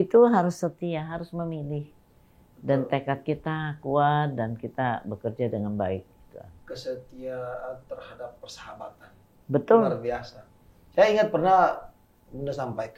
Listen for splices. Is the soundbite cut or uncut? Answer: uncut